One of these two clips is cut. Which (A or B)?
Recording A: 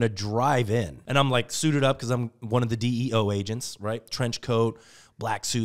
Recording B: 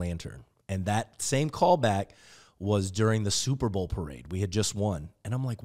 A